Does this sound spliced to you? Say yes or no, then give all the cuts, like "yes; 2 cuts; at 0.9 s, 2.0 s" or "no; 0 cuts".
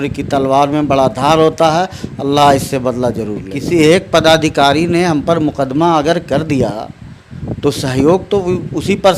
yes; 1 cut; at 3.5 s